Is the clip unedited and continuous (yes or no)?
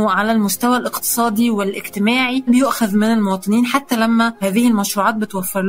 no